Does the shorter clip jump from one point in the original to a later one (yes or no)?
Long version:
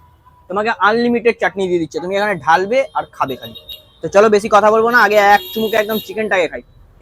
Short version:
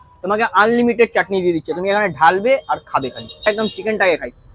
yes